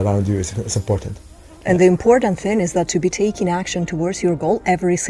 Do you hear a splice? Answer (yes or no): yes